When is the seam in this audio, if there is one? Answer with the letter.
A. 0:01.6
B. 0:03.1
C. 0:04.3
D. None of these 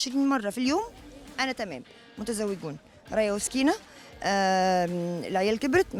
D